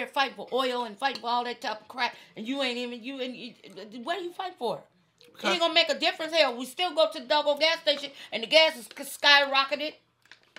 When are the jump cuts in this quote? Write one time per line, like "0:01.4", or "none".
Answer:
none